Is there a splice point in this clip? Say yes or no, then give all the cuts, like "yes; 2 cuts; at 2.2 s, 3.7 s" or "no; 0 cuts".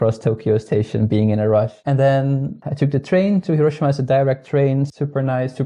yes; 1 cut; at 1.8 s